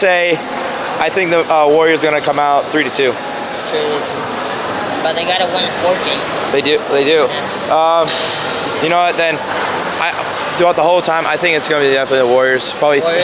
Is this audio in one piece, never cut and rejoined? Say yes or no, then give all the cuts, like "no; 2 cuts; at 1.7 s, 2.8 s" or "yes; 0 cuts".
yes; 0 cuts